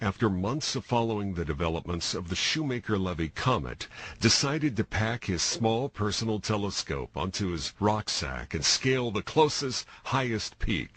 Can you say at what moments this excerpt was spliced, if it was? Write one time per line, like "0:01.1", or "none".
none

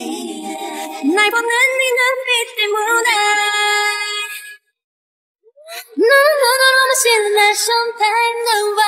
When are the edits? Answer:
0:00.9

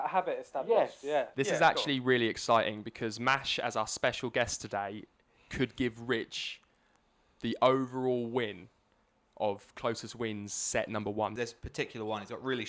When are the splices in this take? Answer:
0:01.3
0:11.3

